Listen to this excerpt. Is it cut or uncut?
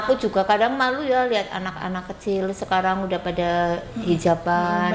uncut